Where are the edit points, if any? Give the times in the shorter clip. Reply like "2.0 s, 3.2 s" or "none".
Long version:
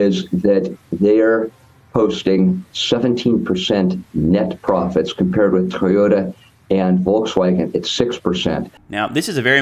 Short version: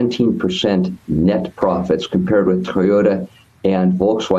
none